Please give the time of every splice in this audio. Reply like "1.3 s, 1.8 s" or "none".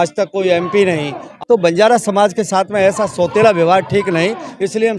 1.3 s